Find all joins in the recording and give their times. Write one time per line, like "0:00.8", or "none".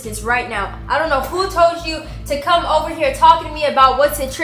none